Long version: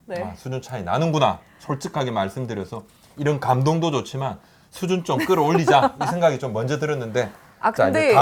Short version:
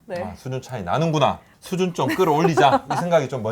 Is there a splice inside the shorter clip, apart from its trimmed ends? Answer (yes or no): yes